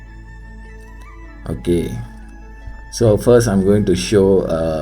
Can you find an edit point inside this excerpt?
yes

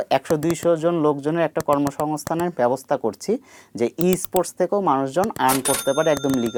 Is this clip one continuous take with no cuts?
yes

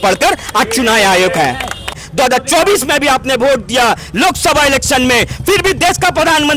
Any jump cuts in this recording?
yes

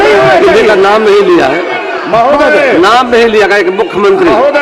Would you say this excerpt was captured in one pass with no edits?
yes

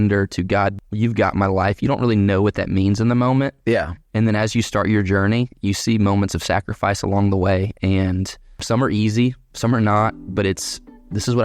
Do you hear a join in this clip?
yes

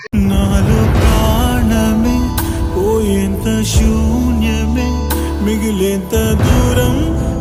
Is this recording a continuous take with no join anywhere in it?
yes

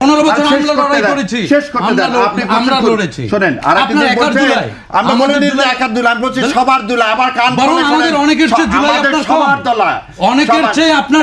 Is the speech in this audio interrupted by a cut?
no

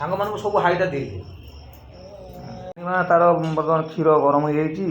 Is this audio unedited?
no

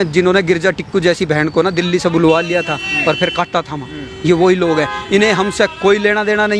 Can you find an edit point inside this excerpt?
no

